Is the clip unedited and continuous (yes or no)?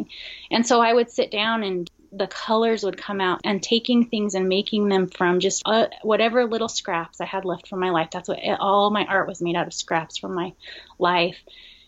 no